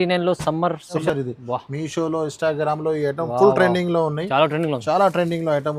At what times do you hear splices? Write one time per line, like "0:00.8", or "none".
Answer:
0:01.0